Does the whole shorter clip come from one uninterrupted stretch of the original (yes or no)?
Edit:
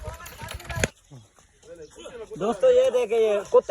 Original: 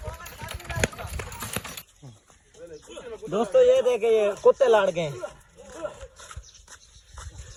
no